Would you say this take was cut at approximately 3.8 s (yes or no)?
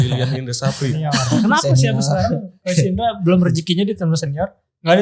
no